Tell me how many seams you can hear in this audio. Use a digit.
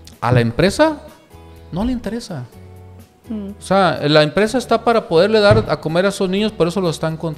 0